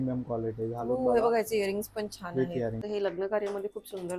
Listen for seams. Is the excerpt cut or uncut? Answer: cut